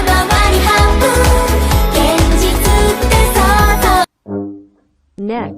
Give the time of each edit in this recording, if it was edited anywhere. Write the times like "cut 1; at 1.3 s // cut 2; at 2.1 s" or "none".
cut 1; at 4.2 s